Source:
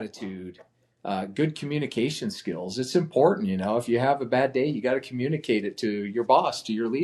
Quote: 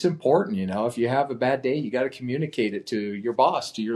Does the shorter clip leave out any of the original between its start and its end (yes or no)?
no